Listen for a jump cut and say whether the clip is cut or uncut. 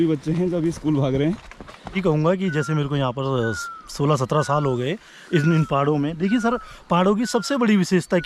cut